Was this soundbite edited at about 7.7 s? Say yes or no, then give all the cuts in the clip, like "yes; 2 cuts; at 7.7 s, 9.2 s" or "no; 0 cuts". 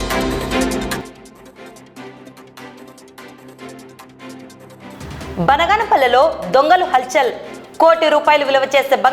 no; 2 cuts; at 1.0 s, 3.5 s